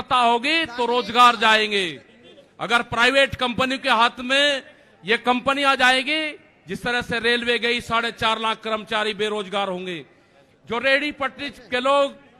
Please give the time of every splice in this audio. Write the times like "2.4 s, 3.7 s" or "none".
none